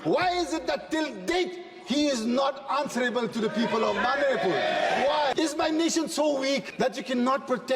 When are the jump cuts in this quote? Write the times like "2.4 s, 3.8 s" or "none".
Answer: 5.3 s, 6.7 s